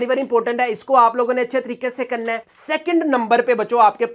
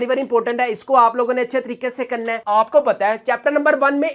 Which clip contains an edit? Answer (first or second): second